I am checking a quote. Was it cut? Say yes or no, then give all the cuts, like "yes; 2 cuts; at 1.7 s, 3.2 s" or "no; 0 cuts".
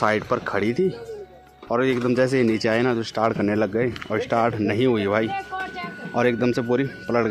no; 0 cuts